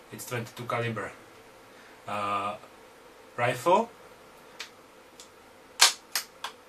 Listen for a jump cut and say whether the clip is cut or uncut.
cut